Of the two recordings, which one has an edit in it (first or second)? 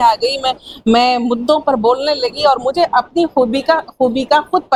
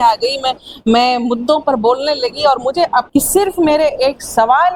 second